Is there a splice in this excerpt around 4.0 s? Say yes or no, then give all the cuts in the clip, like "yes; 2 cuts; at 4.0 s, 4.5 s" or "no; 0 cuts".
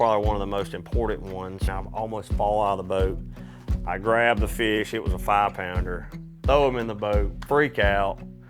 no; 1 cut; at 1.7 s